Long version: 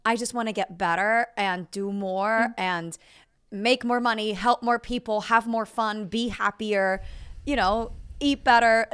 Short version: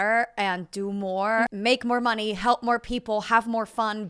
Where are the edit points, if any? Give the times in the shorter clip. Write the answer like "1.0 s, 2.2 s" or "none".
1.5 s